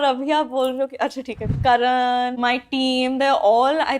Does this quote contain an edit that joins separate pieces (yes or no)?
yes